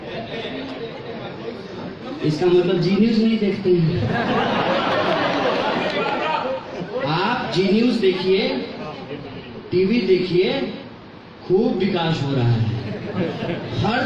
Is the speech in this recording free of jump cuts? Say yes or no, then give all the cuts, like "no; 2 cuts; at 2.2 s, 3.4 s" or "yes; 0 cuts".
yes; 0 cuts